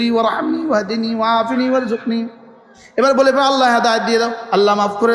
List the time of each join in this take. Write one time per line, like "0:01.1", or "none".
none